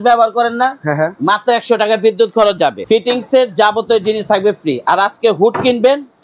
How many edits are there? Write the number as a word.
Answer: one